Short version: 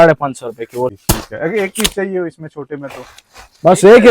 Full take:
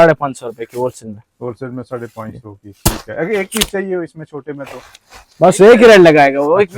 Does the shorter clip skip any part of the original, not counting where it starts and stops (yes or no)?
yes